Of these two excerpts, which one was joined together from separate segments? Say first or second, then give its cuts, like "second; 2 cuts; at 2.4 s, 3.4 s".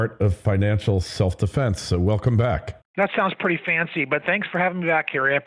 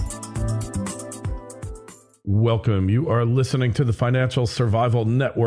second; 1 cut; at 2.0 s